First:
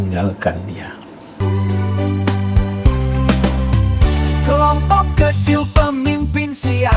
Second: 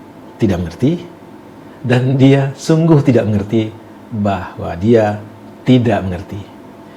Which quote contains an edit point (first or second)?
first